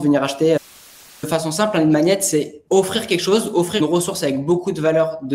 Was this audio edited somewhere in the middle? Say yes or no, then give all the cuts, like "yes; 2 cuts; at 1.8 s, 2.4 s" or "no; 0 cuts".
yes; 3 cuts; at 1.2 s, 2.6 s, 3.8 s